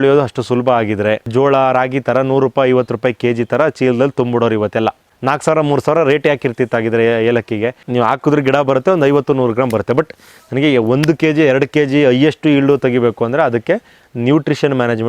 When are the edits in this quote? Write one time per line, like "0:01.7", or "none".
0:01.3
0:05.1
0:07.8